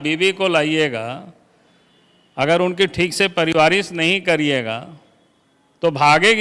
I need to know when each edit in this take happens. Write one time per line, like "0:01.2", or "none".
none